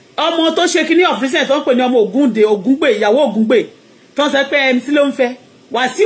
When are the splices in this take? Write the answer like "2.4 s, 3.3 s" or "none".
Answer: none